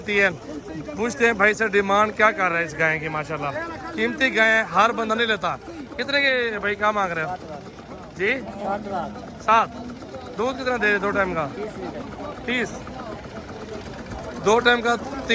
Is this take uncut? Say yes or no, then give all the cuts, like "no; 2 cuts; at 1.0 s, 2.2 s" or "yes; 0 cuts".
yes; 0 cuts